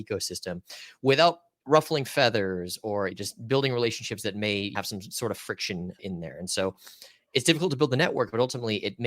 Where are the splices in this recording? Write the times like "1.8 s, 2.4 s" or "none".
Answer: 1.5 s, 3.2 s, 4.7 s, 6.0 s

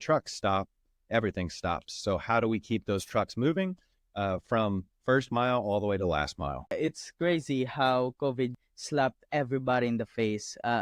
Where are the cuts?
6.7 s, 8.5 s

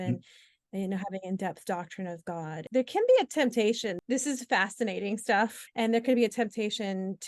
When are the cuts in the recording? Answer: 2.6 s, 4.0 s, 5.6 s

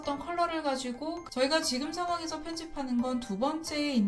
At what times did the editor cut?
1.2 s

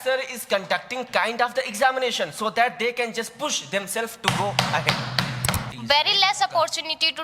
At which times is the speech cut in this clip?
5.6 s

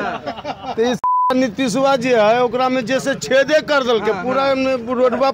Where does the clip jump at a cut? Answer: none

